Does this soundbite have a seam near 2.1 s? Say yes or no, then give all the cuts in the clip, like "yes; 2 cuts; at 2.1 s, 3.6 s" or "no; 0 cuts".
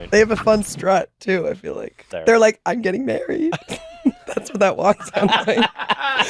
yes; 1 cut; at 2.1 s